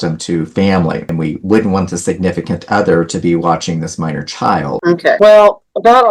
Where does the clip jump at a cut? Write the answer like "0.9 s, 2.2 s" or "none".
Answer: 1.1 s, 5.1 s